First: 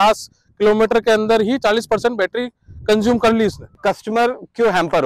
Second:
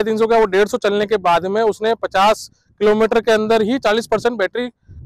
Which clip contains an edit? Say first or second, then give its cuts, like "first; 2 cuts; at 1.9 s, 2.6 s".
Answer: first; 1 cut; at 3.8 s